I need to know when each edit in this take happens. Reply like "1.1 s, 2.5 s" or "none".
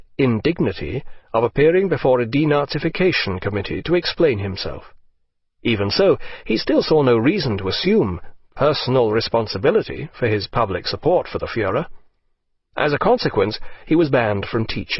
none